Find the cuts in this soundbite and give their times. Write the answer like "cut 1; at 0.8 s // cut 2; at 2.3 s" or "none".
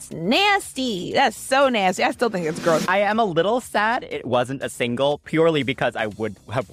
cut 1; at 2.9 s